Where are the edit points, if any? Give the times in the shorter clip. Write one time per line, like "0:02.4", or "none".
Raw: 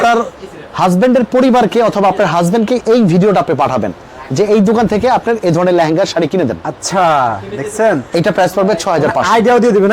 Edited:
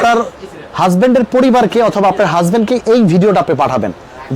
none